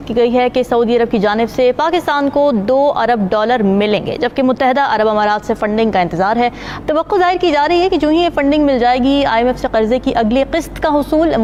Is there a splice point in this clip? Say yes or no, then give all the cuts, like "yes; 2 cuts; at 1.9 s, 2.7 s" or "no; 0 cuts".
no; 0 cuts